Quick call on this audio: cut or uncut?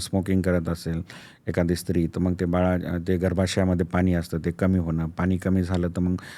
uncut